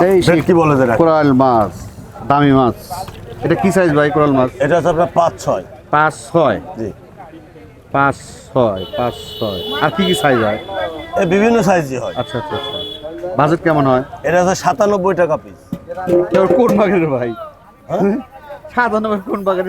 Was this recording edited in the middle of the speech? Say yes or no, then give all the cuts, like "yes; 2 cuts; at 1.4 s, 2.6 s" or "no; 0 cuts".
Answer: no; 0 cuts